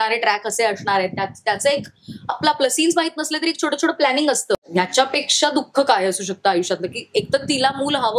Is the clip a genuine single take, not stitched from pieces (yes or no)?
no